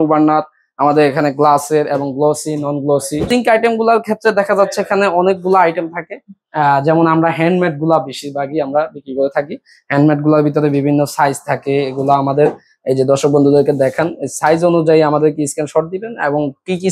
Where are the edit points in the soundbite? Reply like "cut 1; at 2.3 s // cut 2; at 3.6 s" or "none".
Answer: cut 1; at 3.2 s